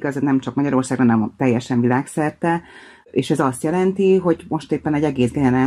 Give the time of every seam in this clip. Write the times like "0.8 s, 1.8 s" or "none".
3.1 s

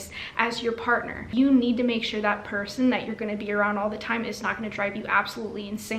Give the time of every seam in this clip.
1.3 s

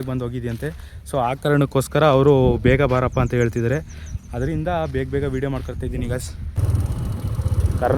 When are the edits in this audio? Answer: 6.6 s

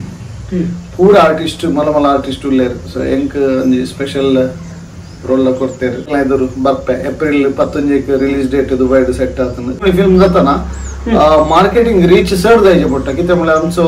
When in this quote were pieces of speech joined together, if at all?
6.1 s, 9.8 s

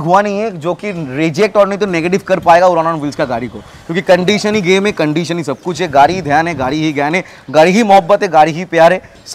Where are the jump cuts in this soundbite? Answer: none

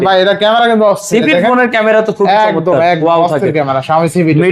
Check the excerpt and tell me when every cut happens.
none

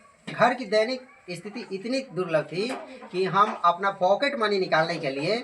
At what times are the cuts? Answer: none

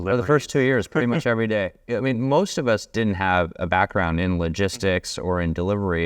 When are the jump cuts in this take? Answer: 1.8 s

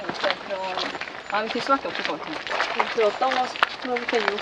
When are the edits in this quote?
2.4 s

